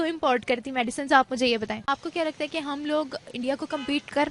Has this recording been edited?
yes; 1 cut; at 1.8 s

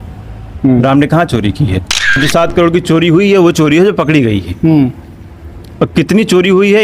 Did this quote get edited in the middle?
yes; 1 cut; at 2.2 s

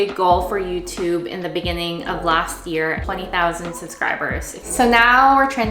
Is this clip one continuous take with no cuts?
no; 2 cuts; at 3.1 s, 4.6 s

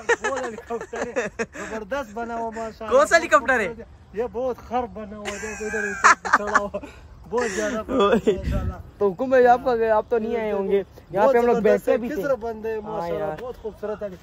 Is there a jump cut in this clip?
no; 0 cuts

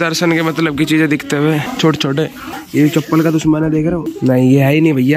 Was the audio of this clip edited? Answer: yes; 3 cuts; at 1.7 s, 2.5 s, 4.1 s

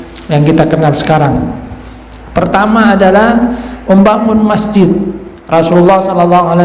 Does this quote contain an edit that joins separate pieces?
no; 0 cuts

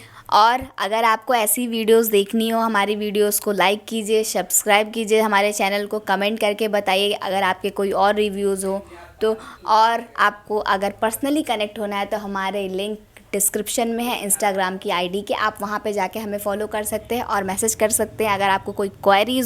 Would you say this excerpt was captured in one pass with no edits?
yes; 0 cuts

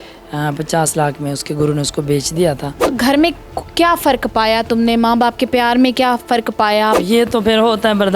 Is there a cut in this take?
yes; 2 cuts; at 2.8 s, 7.0 s

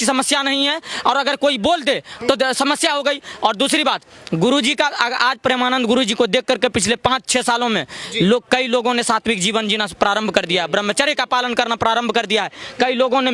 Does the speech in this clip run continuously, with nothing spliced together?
yes; 0 cuts

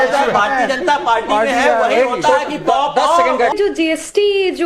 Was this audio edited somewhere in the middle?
yes; 1 cut; at 3.5 s

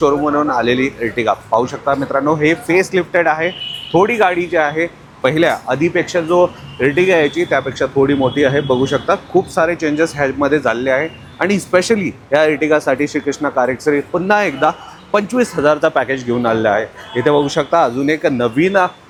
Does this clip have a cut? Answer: no; 0 cuts

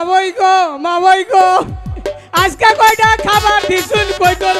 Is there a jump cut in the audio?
no; 0 cuts

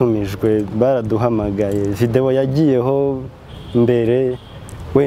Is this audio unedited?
yes; 0 cuts

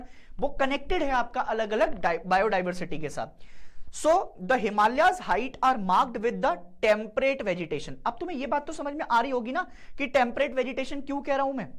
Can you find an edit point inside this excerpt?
no; 0 cuts

